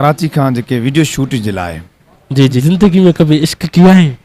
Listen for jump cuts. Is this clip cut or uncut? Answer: cut